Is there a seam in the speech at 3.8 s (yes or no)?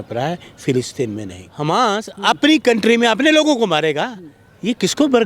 no